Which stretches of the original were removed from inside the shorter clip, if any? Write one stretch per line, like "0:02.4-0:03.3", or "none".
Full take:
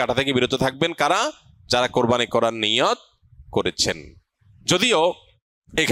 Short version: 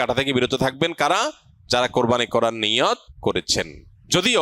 0:03.4-0:04.0